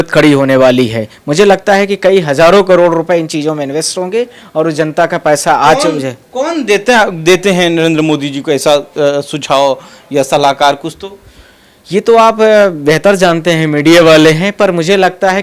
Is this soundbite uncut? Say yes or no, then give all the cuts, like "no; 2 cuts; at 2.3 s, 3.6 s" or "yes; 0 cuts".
yes; 0 cuts